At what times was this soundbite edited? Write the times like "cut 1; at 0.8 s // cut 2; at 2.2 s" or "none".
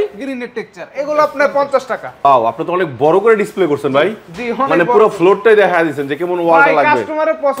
cut 1; at 2.2 s